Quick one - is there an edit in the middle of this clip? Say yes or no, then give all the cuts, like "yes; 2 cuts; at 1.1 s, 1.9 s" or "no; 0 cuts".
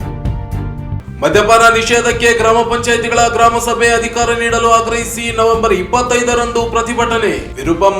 yes; 1 cut; at 1.0 s